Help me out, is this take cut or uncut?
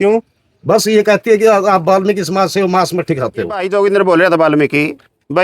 cut